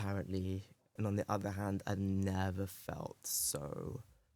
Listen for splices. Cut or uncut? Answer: cut